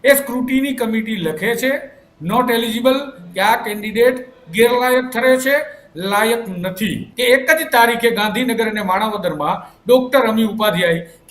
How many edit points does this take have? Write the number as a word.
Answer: one